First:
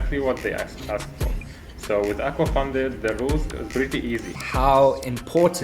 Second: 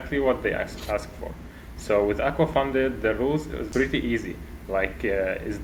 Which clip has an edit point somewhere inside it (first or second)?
first